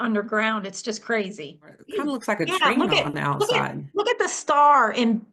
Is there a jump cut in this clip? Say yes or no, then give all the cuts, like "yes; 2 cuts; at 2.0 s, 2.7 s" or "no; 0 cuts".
yes; 1 cut; at 1.8 s